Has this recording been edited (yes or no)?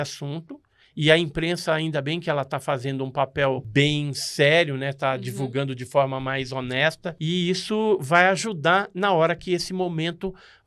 yes